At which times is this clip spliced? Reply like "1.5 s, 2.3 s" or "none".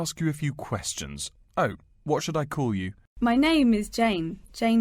3.0 s, 3.7 s